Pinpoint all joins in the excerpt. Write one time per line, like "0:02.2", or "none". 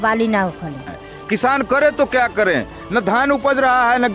0:00.9